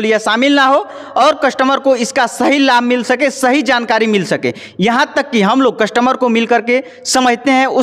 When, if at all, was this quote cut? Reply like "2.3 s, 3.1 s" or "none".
none